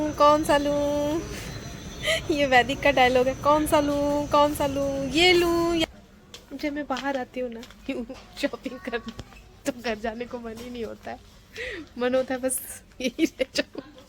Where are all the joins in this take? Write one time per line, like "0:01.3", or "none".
0:05.8